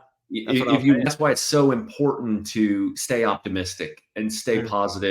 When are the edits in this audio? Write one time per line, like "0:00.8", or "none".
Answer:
0:01.1